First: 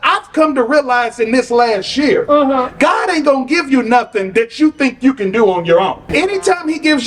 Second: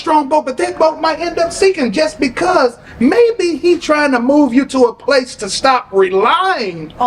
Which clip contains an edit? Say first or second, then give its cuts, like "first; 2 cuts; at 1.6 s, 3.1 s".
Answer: first; 1 cut; at 6.0 s